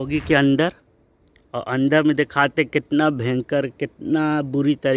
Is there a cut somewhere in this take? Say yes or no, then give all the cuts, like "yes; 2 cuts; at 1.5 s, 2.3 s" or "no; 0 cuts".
no; 0 cuts